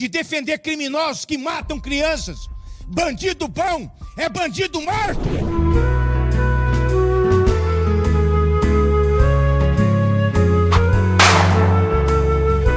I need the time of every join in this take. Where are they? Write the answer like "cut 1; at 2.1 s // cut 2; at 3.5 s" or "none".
cut 1; at 5.5 s

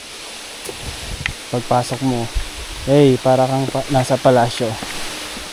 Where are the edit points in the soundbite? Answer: none

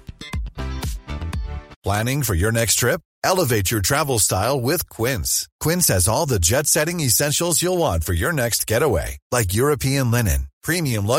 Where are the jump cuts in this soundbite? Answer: cut 1; at 1.7 s

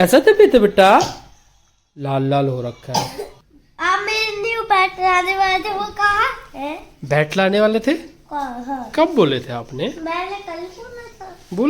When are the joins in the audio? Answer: cut 1; at 3.3 s

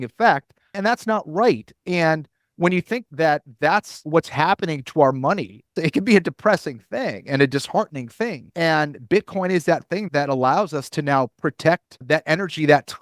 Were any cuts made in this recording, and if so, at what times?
cut 1; at 0.8 s // cut 2; at 3.1 s // cut 3; at 4.0 s // cut 4; at 5.8 s // cut 5; at 8.4 s // cut 6; at 10.1 s // cut 7; at 12.0 s

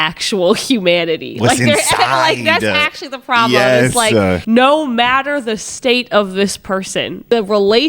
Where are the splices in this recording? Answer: cut 1; at 4.4 s

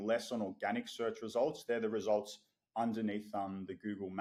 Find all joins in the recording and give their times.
none

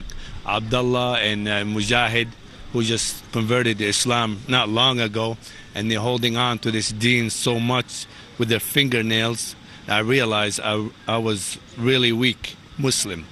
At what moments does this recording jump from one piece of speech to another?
none

